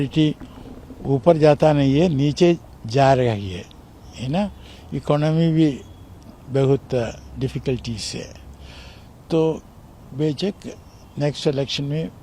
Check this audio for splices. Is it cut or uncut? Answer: uncut